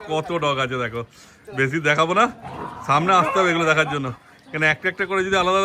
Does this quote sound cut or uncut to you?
uncut